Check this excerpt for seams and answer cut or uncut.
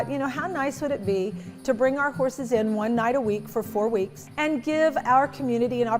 cut